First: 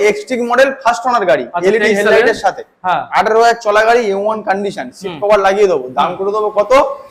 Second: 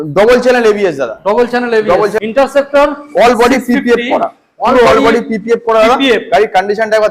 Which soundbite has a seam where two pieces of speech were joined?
second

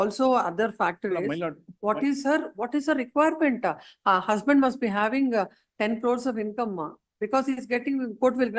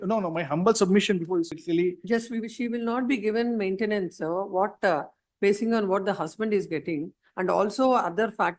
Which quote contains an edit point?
second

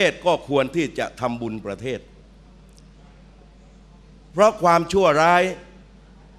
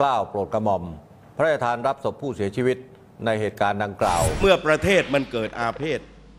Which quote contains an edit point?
second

